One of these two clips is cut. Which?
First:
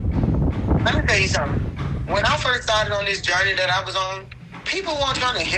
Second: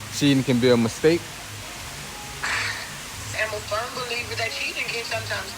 second; 2 cuts; at 1.6 s, 3.3 s

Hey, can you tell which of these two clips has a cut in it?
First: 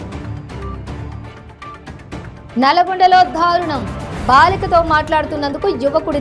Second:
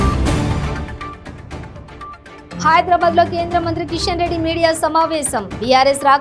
second; 1 cut; at 2.6 s

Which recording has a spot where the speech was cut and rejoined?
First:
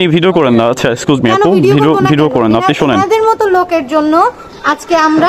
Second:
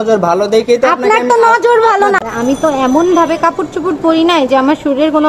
second; 1 cut; at 2.2 s

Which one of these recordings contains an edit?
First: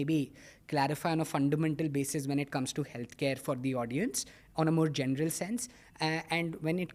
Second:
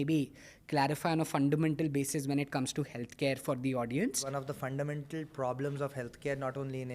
second; 1 cut; at 4.2 s

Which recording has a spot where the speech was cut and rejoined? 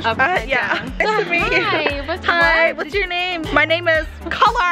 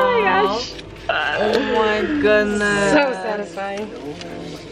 first; 2 cuts; at 1.0 s, 3.4 s

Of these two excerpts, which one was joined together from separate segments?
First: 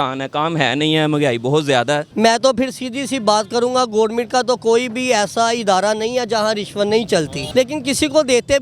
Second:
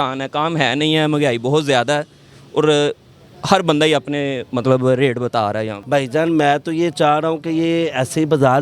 first; 2 cuts; at 2.1 s, 7.4 s

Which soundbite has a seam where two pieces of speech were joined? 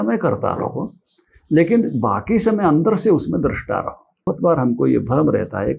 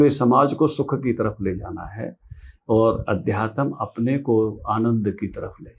first; 1 cut; at 4.3 s

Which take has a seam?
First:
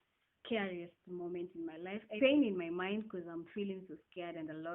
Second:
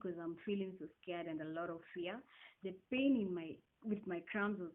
first; 1 cut; at 2.2 s

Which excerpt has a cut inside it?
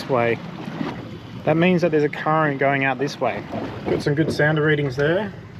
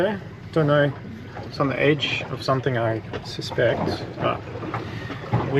first; 2 cuts; at 1.0 s, 3.7 s

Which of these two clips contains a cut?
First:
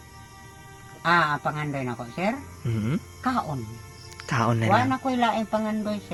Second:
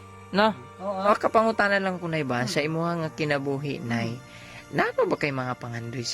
second; 1 cut; at 1.0 s

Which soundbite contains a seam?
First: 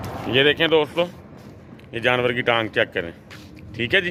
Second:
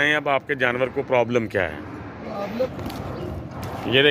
second; 1 cut; at 2.7 s

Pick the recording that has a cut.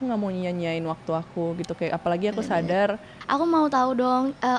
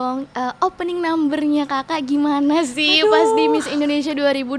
first; 1 cut; at 3.1 s

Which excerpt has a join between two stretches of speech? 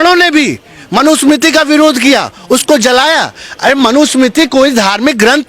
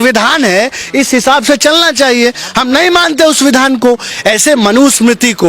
second; 1 cut; at 4.1 s

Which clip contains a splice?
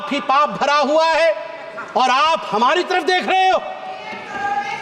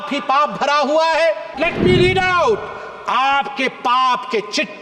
second; 1 cut; at 1.6 s

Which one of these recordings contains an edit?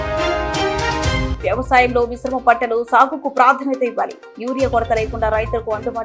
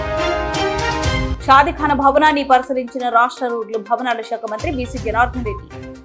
first; 1 cut; at 1.3 s

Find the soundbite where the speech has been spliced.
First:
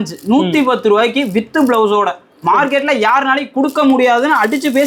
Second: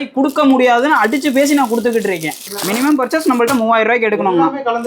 second; 1 cut; at 2.5 s

